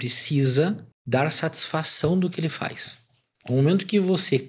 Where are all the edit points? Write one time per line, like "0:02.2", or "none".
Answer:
0:00.9